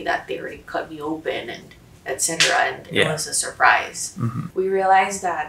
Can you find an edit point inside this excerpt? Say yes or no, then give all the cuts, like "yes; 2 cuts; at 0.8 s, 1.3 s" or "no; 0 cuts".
yes; 1 cut; at 4.4 s